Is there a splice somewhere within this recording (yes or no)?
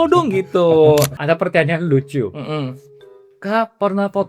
yes